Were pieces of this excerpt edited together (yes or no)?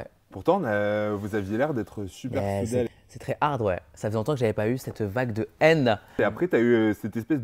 yes